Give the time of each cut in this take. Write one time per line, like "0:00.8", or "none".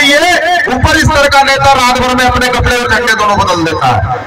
none